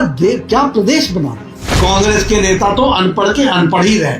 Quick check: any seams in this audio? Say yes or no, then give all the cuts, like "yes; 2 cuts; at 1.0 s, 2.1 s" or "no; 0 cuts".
yes; 1 cut; at 1.8 s